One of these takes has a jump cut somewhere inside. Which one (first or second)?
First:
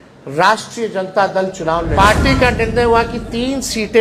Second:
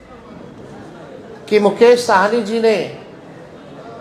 first